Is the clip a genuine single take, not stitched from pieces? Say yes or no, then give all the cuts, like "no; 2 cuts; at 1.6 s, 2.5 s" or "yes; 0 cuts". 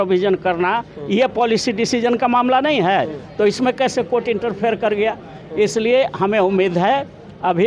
yes; 0 cuts